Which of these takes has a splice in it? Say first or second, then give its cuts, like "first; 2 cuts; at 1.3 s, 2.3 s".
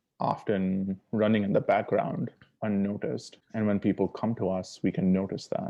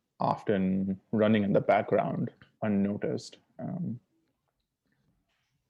first; 1 cut; at 3.4 s